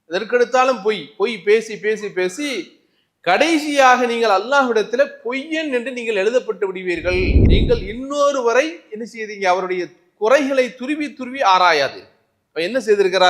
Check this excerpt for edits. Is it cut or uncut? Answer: cut